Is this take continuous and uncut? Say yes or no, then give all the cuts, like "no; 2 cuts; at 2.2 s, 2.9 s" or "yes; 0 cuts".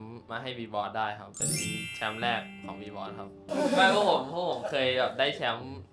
yes; 0 cuts